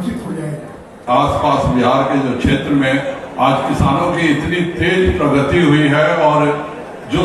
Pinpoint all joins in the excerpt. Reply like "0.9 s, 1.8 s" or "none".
1.0 s